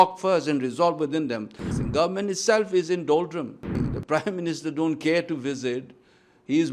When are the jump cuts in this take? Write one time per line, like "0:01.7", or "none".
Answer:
0:01.7
0:03.8